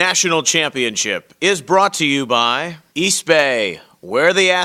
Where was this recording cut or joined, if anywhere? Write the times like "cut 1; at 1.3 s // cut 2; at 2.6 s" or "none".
cut 1; at 2.7 s

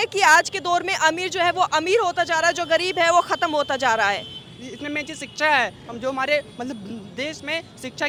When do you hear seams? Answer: none

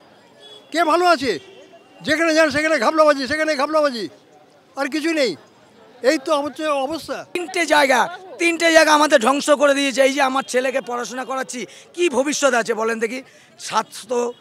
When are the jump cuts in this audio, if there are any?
cut 1; at 7.2 s

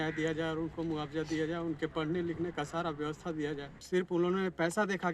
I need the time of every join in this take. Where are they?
cut 1; at 3.7 s

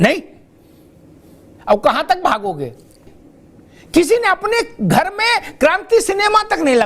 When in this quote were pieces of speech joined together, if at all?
cut 1; at 3.0 s

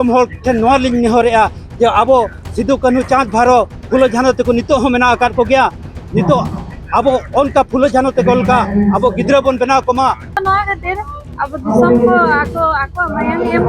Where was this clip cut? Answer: cut 1; at 10.4 s

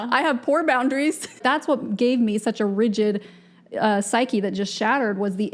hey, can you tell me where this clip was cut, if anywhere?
cut 1; at 1.4 s

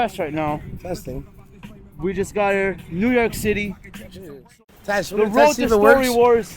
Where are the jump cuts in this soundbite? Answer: cut 1; at 4.4 s

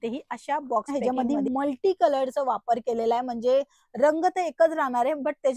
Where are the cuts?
cut 1; at 0.9 s

